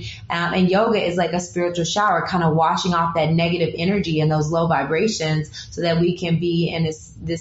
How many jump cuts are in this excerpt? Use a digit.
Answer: 0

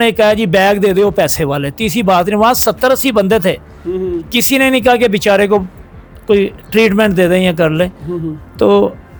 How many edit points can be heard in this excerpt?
0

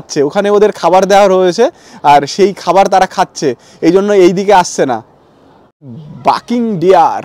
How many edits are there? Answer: 0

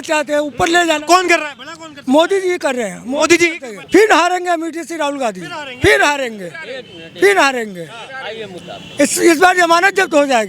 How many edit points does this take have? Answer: 1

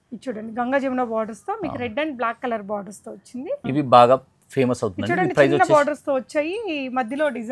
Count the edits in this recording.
1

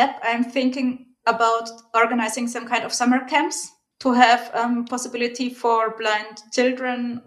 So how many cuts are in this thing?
1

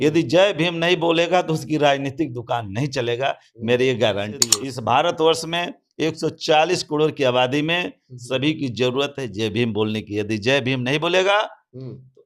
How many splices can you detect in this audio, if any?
1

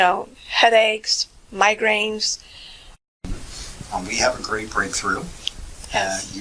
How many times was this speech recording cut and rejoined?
1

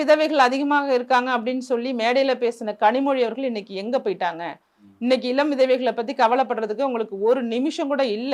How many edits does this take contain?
0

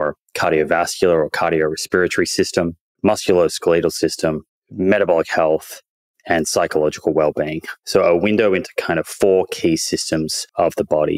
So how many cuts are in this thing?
0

